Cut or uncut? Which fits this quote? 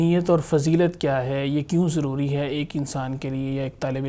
uncut